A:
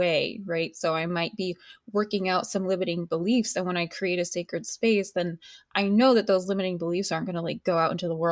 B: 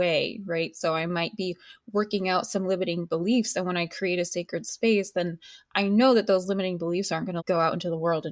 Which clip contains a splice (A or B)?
B